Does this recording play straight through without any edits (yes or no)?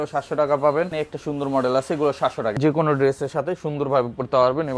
no